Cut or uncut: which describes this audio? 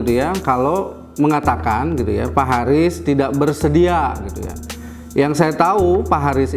uncut